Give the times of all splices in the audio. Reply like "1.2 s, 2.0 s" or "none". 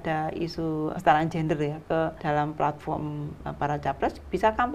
0.9 s, 2.2 s